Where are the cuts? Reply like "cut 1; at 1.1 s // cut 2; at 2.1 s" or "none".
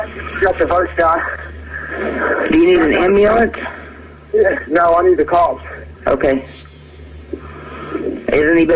cut 1; at 2.3 s